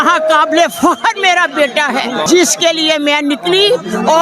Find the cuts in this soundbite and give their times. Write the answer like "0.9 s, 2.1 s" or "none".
2.2 s